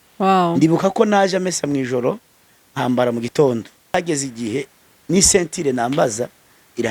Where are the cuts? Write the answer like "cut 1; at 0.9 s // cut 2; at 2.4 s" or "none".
cut 1; at 3.9 s